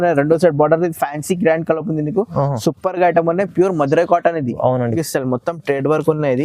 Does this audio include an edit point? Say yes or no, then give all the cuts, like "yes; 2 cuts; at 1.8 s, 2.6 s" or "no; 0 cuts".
yes; 1 cut; at 5.0 s